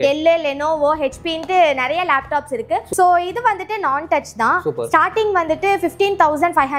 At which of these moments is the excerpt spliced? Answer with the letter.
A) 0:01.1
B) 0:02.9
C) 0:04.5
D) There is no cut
B